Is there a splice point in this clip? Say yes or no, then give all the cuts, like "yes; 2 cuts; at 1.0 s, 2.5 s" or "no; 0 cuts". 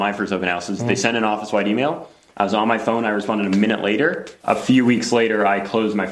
yes; 1 cut; at 4.3 s